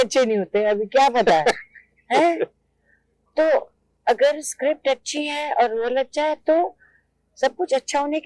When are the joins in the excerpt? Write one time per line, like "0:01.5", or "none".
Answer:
none